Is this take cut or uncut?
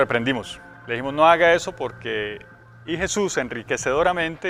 uncut